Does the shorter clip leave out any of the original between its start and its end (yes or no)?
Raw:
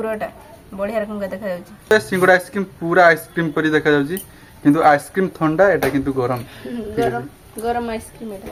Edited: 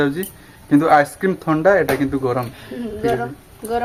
no